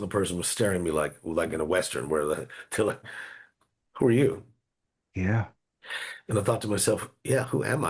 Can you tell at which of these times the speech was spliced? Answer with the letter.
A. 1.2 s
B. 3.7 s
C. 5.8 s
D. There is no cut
D